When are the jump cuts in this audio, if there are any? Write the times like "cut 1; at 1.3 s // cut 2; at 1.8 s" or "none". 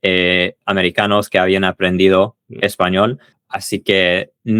none

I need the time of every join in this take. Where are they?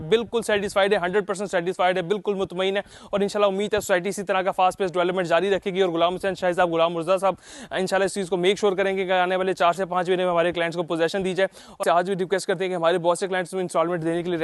cut 1; at 11.8 s

